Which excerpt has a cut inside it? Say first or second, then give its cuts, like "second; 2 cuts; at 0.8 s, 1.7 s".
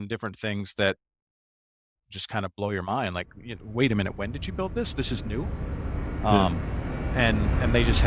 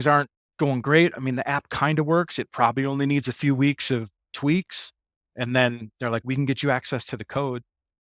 second; 3 cuts; at 1.1 s, 4.3 s, 5.2 s